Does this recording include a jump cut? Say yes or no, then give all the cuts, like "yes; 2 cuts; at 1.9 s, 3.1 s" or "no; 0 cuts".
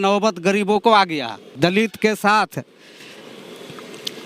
yes; 1 cut; at 1.5 s